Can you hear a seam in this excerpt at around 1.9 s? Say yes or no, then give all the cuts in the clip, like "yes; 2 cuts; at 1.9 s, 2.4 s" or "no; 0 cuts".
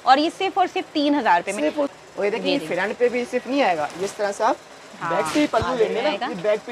yes; 1 cut; at 1.9 s